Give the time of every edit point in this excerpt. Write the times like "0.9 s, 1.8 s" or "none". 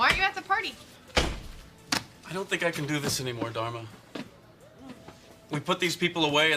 5.2 s